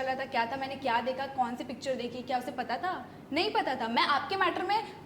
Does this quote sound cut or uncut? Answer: uncut